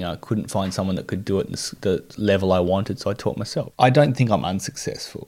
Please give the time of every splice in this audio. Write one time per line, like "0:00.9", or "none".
0:03.6